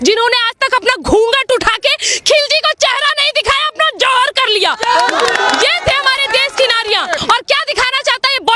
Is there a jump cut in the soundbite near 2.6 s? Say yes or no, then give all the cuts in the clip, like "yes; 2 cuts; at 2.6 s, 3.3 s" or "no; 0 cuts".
no; 1 cut; at 7.2 s